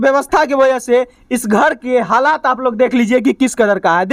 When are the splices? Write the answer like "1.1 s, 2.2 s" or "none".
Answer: none